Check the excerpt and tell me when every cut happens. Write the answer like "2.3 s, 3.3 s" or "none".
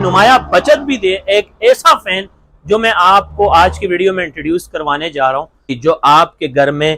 5.8 s